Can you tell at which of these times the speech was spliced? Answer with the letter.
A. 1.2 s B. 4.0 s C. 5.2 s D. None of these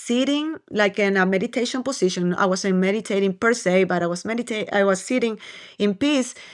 D